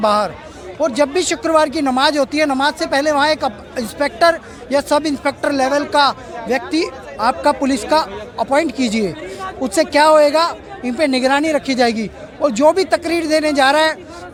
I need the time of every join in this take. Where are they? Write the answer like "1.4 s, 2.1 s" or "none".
none